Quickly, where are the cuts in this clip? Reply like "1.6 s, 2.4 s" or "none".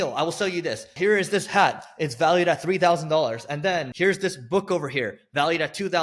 0.9 s, 3.9 s